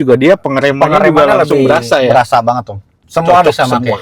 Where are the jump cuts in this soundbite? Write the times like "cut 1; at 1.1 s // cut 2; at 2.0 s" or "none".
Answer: cut 1; at 3.0 s